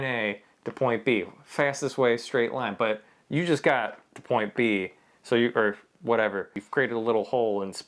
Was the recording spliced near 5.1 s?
no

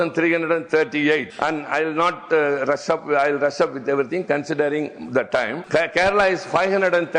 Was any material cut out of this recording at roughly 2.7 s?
no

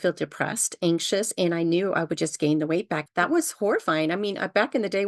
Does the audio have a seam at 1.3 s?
no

